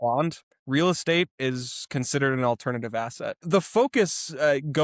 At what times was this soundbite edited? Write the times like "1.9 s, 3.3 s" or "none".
3.4 s